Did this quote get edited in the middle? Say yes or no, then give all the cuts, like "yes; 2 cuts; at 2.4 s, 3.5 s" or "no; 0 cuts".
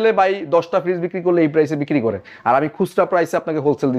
no; 0 cuts